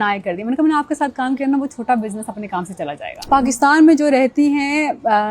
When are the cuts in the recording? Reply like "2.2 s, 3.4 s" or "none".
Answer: 3.1 s